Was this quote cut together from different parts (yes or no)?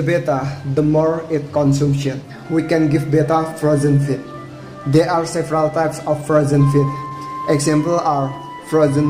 yes